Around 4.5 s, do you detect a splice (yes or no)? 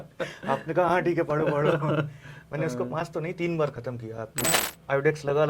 yes